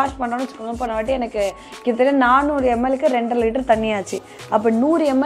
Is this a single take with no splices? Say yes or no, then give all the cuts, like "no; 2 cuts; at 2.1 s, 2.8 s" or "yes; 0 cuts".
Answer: yes; 0 cuts